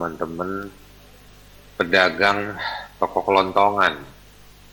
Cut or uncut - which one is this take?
uncut